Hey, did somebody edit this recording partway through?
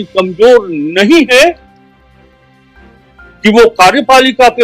yes; 2 cuts; at 1.7 s, 3.4 s

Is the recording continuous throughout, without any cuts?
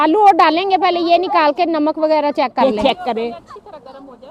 yes; 0 cuts

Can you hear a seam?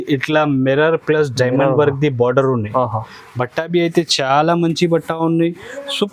no; 0 cuts

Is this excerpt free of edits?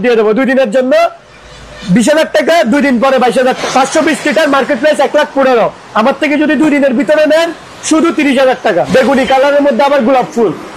no; 2 cuts; at 3.6 s, 8.9 s

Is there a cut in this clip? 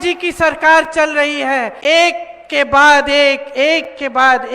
yes; 1 cut; at 1.7 s

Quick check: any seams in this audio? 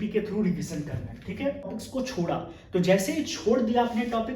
yes; 1 cut; at 1.8 s

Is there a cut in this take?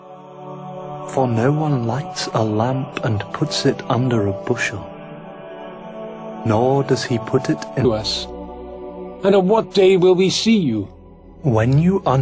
no; 0 cuts

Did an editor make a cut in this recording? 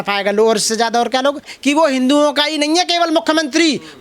yes; 1 cut; at 1.4 s

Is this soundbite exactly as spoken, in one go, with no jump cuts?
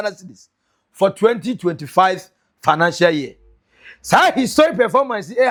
yes; 0 cuts

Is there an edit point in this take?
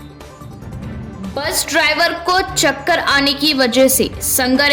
yes; 1 cut; at 0.9 s

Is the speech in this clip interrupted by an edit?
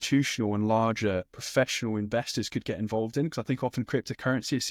no; 0 cuts

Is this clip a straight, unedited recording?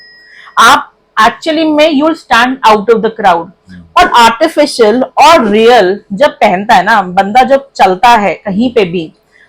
yes; 0 cuts

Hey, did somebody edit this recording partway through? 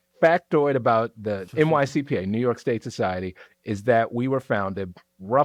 no; 0 cuts

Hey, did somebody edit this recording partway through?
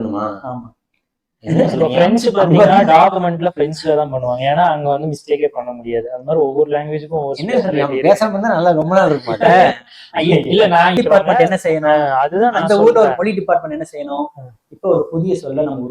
yes; 1 cut; at 11.0 s

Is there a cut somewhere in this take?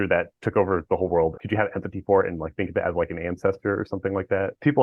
yes; 1 cut; at 1.3 s

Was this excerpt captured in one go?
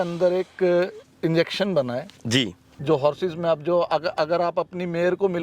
no; 1 cut; at 2.6 s

